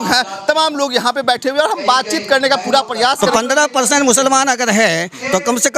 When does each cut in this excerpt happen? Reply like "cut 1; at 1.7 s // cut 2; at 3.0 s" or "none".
cut 1; at 3.3 s